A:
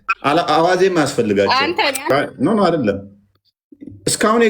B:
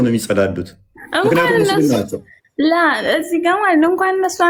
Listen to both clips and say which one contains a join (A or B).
A